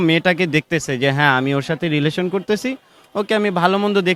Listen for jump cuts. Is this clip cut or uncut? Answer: uncut